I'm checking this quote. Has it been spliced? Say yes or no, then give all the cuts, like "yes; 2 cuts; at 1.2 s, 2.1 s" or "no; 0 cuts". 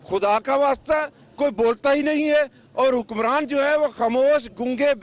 no; 0 cuts